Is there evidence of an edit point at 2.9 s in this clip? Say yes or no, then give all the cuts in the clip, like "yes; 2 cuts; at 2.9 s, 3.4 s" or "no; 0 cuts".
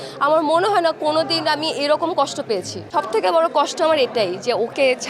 yes; 1 cut; at 2.9 s